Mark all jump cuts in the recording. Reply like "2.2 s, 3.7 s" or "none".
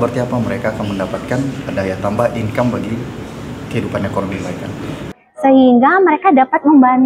5.2 s